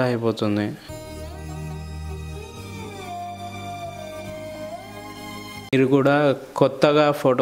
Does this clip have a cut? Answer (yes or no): yes